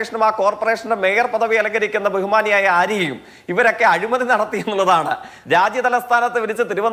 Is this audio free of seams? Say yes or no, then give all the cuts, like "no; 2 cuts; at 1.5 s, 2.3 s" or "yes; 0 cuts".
no; 1 cut; at 5.3 s